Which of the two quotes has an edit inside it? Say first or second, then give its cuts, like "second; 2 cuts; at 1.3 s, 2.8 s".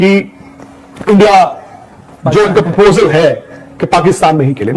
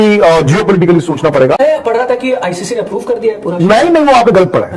second; 1 cut; at 1.6 s